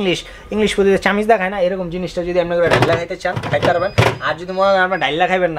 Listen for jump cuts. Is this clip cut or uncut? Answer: uncut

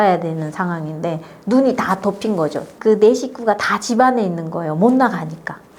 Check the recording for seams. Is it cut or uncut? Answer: cut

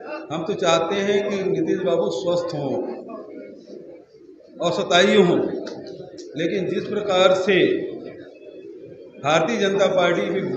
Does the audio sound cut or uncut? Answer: uncut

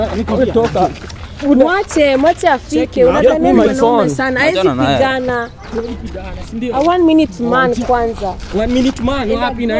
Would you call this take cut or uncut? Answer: uncut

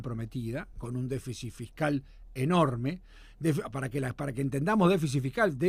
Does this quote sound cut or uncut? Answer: uncut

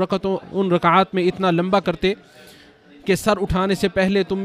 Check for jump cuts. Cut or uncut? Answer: uncut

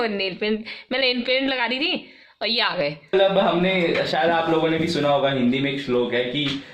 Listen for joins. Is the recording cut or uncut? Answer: cut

